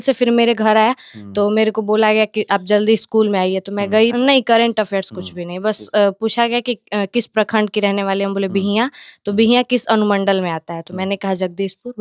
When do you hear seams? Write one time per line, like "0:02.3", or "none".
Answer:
0:04.1